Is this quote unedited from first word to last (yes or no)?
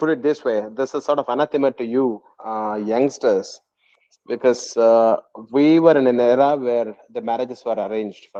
yes